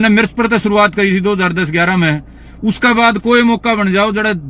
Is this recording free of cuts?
yes; 0 cuts

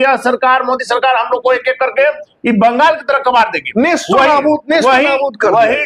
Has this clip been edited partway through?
no; 0 cuts

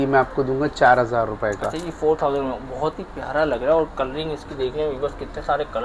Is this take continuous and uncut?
yes; 0 cuts

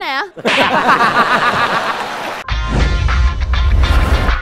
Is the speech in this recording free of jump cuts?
no; 1 cut; at 2.4 s

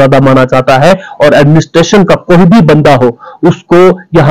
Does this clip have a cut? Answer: no; 0 cuts

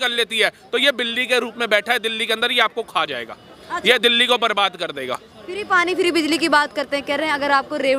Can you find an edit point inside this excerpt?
no; 0 cuts

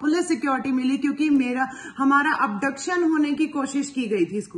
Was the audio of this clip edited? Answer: no; 0 cuts

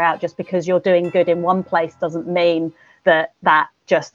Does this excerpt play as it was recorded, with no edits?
yes; 0 cuts

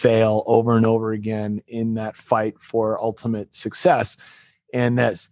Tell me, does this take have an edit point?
no; 0 cuts

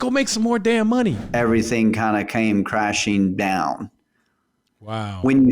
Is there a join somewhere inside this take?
yes; 1 cut; at 1.2 s

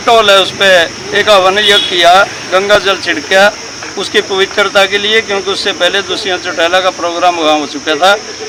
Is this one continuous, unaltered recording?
yes; 0 cuts

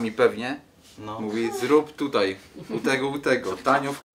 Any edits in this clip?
no; 0 cuts

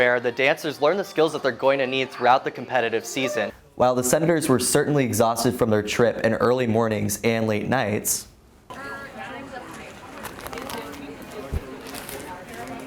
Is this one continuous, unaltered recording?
no; 1 cut; at 3.6 s

